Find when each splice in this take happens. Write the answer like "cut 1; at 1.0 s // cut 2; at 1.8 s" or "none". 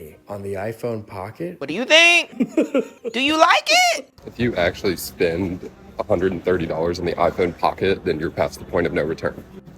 cut 1; at 1.6 s // cut 2; at 3.0 s // cut 3; at 4.2 s